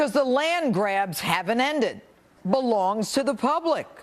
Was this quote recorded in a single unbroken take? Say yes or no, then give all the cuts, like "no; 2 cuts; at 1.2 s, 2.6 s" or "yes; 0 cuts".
yes; 0 cuts